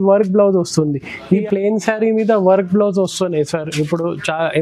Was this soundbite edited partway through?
yes; 1 cut; at 1.4 s

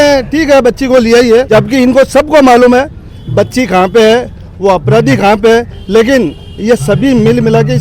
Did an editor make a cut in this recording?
yes; 1 cut; at 1.5 s

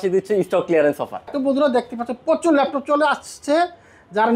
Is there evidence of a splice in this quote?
yes; 1 cut; at 1.3 s

